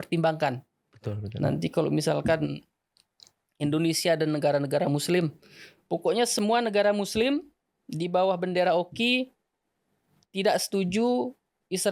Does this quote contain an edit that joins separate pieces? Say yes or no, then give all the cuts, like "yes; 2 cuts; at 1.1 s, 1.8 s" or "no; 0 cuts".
no; 0 cuts